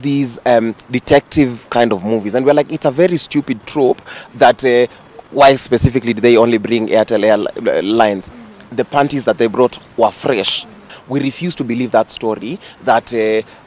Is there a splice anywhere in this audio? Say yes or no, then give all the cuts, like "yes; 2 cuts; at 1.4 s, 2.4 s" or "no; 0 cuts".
yes; 1 cut; at 10.9 s